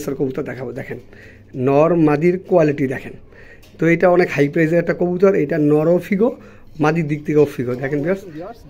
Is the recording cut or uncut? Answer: uncut